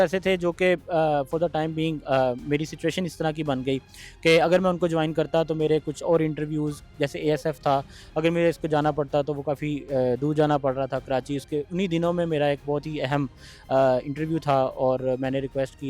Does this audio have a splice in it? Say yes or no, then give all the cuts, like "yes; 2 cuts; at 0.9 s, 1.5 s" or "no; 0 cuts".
no; 0 cuts